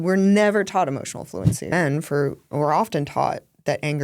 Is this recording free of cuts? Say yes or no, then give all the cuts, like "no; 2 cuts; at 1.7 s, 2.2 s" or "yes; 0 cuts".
no; 1 cut; at 1.7 s